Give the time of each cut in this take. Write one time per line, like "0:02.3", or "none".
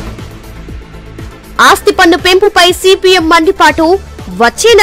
0:01.4